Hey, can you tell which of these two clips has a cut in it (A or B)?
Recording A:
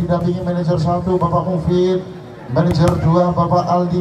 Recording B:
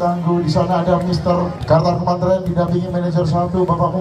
B